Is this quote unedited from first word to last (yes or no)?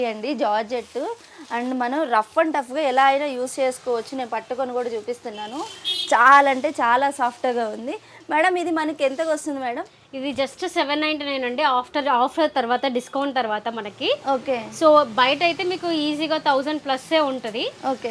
yes